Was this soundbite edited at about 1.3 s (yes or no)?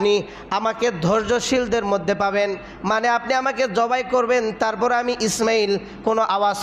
no